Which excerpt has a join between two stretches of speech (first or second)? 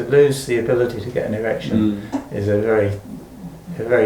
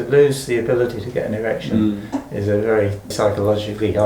second